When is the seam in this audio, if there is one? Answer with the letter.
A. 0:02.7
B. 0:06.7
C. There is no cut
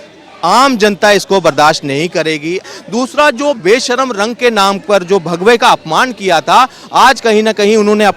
A